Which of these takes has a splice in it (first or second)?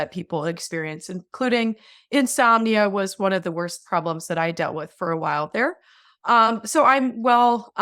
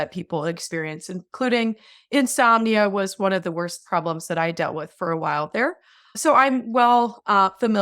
second